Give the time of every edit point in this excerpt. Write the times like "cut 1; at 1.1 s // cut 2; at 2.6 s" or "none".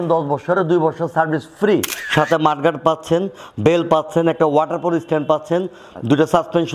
cut 1; at 2.0 s